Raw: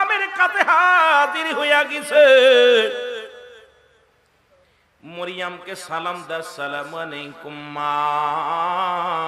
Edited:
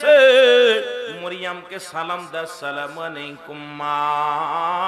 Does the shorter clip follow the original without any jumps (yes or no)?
no